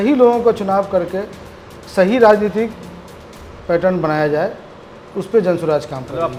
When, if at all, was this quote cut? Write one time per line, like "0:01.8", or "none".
none